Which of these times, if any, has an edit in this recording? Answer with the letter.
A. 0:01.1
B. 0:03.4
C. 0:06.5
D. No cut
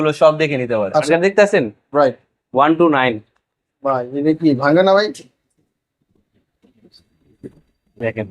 A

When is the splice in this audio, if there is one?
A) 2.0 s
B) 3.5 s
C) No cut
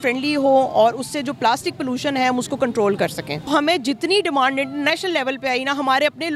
B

